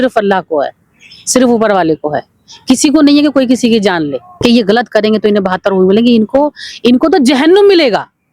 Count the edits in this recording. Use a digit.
1